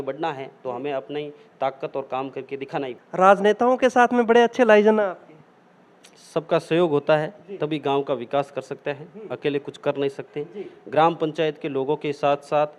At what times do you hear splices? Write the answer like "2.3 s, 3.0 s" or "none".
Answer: 3.0 s

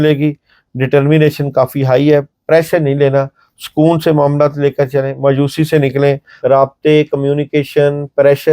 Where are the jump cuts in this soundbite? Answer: 6.3 s

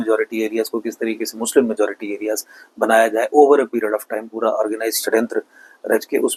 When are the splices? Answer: none

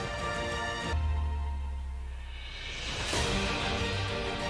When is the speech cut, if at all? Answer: 0.9 s

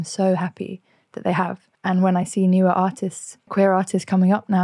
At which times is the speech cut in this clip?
1.7 s, 3.5 s

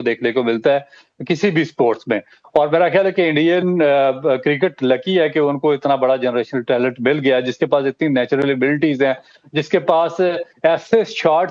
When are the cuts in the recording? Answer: none

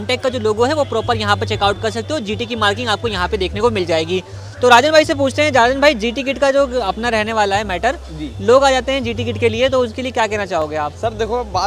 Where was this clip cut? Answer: none

